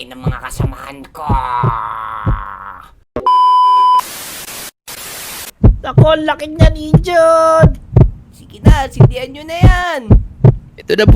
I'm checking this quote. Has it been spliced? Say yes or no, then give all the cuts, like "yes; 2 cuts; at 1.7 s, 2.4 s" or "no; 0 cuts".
yes; 2 cuts; at 2.9 s, 5.5 s